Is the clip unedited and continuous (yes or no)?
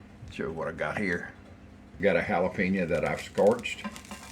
no